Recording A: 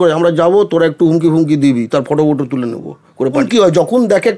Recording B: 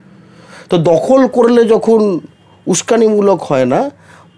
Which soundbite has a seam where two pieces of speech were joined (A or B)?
A